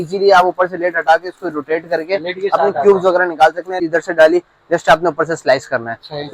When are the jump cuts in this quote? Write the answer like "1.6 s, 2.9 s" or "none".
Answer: 3.7 s